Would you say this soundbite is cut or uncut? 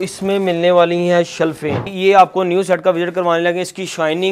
cut